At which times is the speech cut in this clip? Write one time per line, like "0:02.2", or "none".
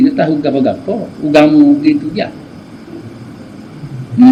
none